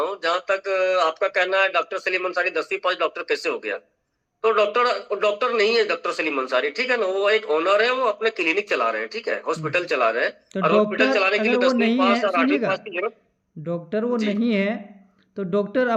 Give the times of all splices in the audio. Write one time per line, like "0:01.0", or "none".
none